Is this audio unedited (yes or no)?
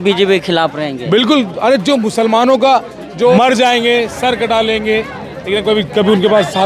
no